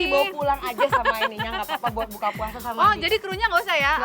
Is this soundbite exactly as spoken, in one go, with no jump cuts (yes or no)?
yes